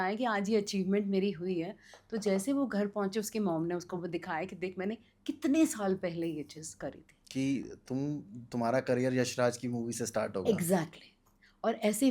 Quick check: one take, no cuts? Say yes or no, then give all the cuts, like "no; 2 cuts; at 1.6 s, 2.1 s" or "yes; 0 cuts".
yes; 0 cuts